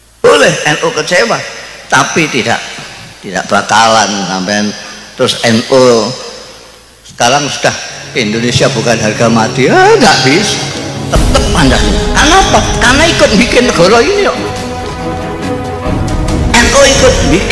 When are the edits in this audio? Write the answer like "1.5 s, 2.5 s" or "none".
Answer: none